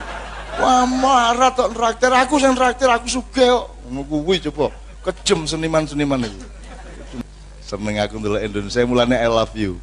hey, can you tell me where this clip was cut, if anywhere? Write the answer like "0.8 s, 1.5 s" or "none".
7.2 s

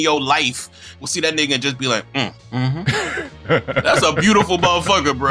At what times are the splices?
2.7 s, 3.8 s

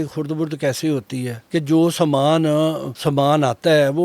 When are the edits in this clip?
1.4 s, 2.9 s

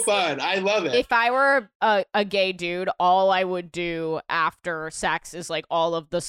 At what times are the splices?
0.9 s

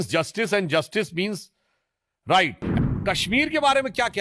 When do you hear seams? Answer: 2.6 s

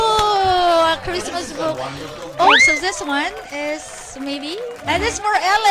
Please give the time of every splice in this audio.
2.5 s

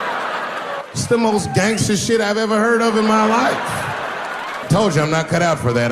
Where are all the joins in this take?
0.8 s, 4.6 s

